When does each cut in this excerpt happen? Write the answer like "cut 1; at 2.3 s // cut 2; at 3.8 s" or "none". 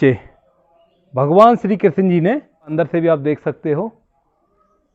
cut 1; at 2.7 s